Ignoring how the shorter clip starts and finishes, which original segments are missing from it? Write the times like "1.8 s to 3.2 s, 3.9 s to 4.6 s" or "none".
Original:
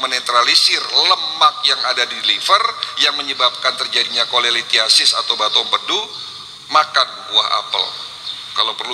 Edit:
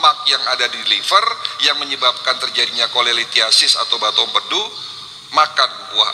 none